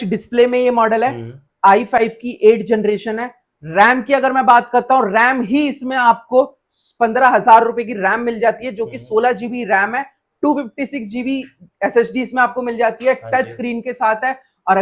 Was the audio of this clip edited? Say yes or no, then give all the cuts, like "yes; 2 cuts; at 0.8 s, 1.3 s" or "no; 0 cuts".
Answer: no; 0 cuts